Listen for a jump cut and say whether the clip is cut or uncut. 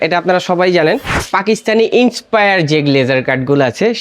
cut